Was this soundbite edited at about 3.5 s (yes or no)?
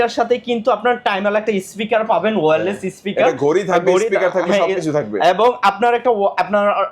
no